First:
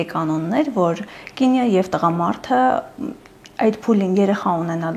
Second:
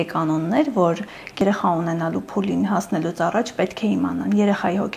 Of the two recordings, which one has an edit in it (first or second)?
second